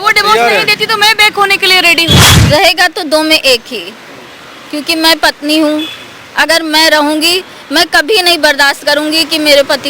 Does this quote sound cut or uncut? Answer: cut